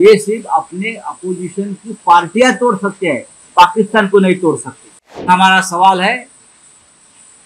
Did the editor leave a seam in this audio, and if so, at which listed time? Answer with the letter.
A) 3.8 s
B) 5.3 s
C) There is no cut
B